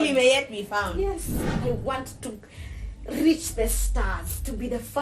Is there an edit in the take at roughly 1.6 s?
yes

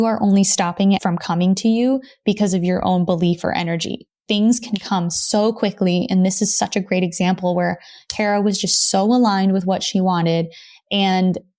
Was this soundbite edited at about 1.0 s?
yes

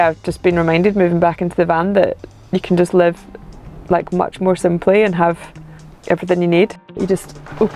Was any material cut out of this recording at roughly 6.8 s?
yes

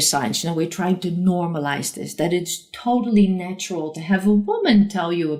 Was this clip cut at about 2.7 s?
no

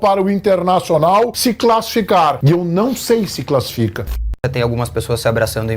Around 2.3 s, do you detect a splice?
no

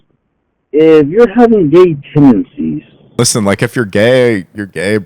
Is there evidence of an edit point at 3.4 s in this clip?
yes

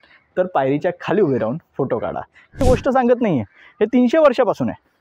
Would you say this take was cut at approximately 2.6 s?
yes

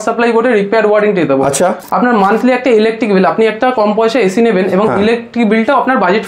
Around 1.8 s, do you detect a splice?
yes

